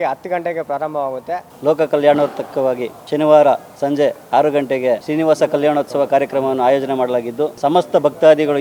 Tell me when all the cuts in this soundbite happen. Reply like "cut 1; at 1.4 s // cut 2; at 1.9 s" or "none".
cut 1; at 1.5 s // cut 2; at 2.9 s // cut 3; at 5.0 s // cut 4; at 7.5 s